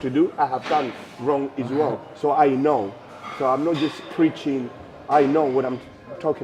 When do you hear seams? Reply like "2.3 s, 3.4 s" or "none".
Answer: none

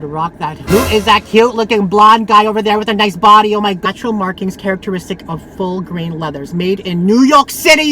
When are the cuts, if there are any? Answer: 3.8 s

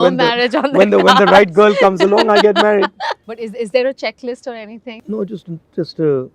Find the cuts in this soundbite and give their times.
3.1 s, 4.9 s

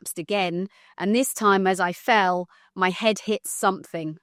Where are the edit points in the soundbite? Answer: none

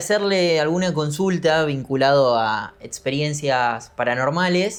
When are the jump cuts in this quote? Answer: none

